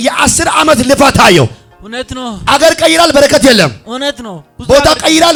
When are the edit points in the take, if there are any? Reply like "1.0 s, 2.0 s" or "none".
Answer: none